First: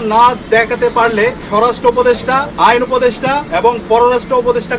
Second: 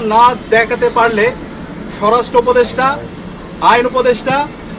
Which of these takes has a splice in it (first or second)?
first